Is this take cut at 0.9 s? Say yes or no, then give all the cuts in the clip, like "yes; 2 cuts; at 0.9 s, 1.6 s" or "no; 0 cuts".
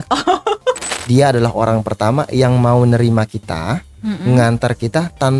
yes; 1 cut; at 0.9 s